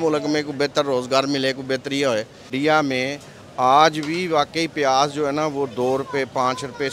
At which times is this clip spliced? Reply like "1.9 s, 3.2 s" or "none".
2.4 s